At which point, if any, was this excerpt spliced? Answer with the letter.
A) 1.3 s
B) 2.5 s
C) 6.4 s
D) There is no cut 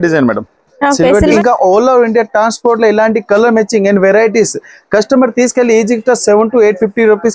A